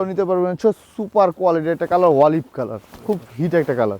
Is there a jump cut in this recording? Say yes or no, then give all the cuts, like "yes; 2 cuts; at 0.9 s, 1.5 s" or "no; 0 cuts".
no; 0 cuts